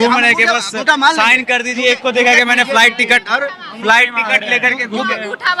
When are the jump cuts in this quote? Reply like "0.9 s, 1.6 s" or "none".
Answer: none